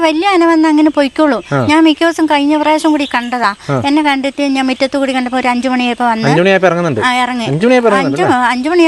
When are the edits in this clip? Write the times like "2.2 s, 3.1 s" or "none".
none